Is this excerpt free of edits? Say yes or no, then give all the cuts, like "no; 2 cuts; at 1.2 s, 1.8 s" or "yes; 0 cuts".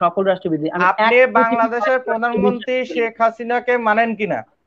yes; 0 cuts